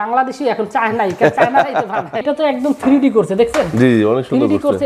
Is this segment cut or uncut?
cut